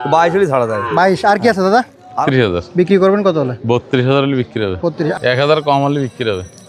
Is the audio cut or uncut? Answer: cut